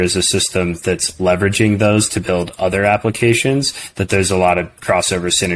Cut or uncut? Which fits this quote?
uncut